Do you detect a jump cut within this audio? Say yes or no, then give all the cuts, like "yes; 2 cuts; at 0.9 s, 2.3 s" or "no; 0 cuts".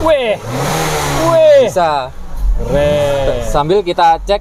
no; 0 cuts